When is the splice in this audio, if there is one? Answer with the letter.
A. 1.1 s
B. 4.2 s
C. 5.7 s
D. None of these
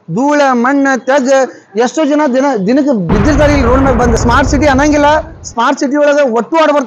B